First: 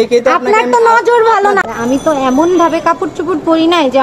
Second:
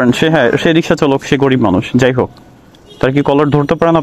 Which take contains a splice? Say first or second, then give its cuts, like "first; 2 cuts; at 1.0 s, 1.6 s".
first; 1 cut; at 1.6 s